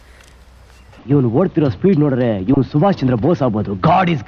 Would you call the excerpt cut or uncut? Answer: uncut